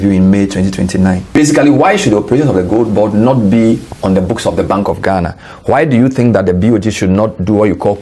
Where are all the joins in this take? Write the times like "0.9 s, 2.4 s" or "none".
1.4 s